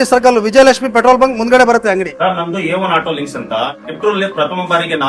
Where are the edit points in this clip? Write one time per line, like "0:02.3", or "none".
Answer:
0:02.1